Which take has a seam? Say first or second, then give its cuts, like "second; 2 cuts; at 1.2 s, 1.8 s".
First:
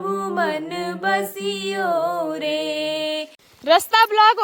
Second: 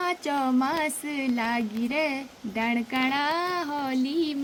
first; 1 cut; at 3.5 s